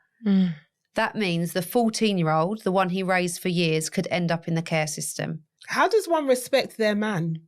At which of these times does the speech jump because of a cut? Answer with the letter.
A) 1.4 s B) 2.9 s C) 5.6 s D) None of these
C